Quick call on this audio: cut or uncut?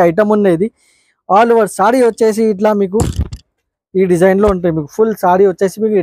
uncut